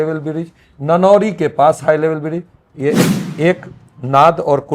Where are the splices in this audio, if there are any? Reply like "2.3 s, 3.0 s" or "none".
3.0 s